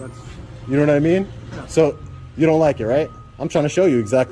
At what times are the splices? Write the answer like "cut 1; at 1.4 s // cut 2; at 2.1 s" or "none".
none